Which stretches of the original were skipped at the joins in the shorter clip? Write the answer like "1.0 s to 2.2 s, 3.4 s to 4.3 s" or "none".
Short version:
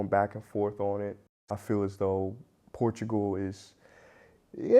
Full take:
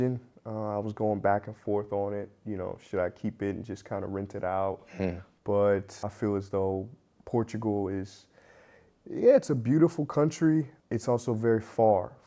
2.5 s to 5.9 s